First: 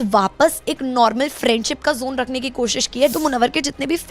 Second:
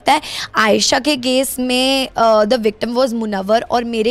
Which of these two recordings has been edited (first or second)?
first